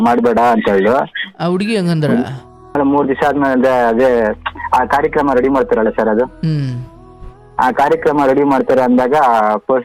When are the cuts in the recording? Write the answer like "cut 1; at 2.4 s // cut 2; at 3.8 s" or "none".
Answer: cut 1; at 2.8 s